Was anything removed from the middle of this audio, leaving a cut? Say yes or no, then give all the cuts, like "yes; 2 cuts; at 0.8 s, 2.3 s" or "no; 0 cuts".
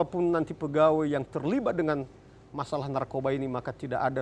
no; 0 cuts